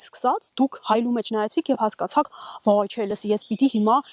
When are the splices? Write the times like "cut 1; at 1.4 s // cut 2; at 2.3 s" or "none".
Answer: none